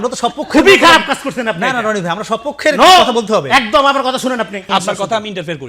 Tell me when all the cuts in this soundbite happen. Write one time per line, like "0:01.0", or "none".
0:04.7